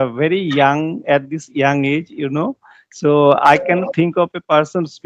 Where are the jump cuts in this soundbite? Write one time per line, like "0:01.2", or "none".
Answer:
none